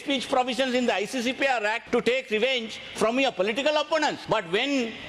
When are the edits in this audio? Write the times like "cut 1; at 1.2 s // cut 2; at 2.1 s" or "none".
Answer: cut 1; at 1.8 s // cut 2; at 4.2 s